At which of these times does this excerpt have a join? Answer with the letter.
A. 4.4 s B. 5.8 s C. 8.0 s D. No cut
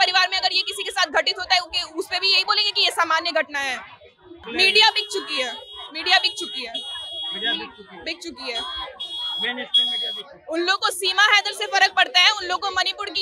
A